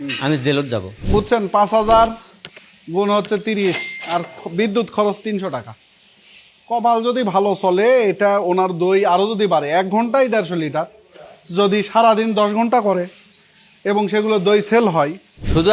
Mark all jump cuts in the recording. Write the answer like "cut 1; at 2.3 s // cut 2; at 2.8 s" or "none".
cut 1; at 1.0 s